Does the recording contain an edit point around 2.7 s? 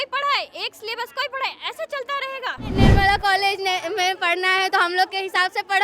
yes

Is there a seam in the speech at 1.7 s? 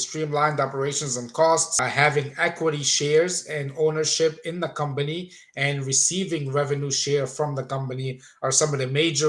yes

